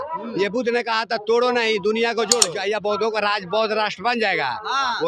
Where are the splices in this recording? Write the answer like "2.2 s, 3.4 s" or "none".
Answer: 2.5 s

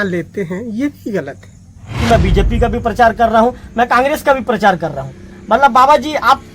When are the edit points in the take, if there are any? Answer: 2.0 s

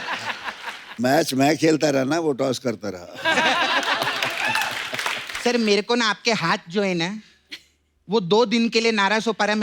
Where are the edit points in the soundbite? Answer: 5.3 s

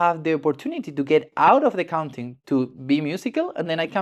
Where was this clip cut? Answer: none

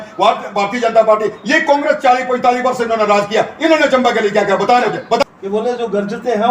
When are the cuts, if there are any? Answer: 5.2 s

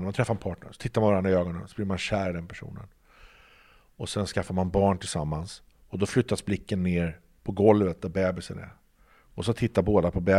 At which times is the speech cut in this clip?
none

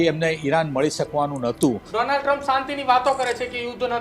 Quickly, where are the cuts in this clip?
1.8 s

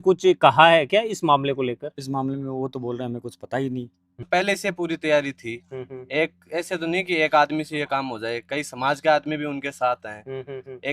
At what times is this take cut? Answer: 4.3 s

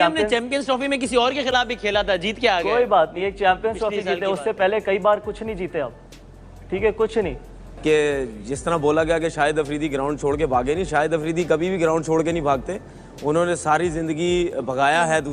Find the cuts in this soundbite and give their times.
7.8 s

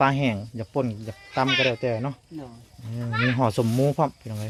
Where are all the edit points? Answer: none

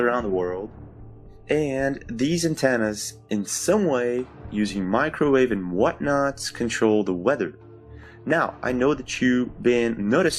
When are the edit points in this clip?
5.5 s

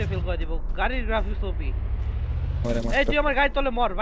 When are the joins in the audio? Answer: 2.6 s

